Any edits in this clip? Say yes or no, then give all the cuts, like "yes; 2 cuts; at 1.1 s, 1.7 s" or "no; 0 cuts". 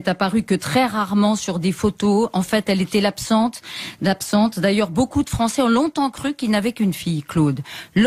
no; 0 cuts